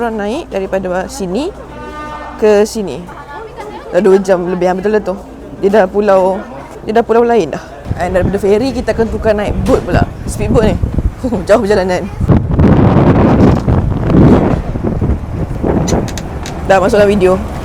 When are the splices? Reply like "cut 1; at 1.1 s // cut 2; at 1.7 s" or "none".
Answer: none